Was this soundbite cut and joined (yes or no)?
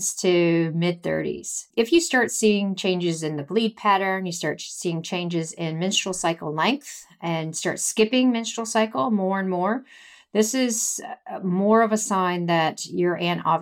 yes